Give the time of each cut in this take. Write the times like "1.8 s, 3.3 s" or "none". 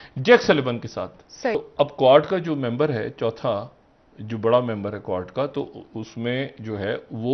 1.6 s